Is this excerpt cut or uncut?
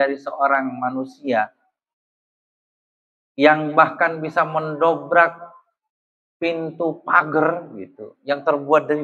uncut